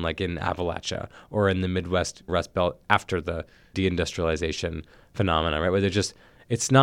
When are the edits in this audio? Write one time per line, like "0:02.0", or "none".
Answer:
0:02.2
0:03.6